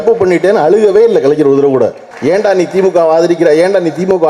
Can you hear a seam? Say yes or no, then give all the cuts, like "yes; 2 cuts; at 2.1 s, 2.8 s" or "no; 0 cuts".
yes; 1 cut; at 2.1 s